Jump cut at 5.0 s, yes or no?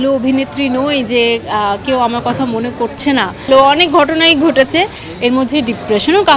no